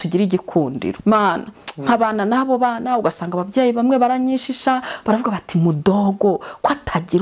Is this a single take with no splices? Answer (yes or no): no